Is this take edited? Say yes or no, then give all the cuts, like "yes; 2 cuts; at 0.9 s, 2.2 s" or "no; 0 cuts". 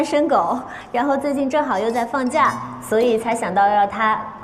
no; 0 cuts